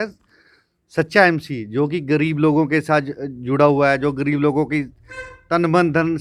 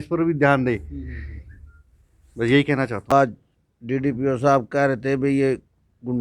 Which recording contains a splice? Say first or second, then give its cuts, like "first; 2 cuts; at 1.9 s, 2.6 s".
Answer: second; 1 cut; at 3.1 s